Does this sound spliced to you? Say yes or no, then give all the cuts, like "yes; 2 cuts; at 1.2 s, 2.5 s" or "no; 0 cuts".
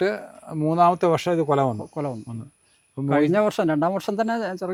no; 0 cuts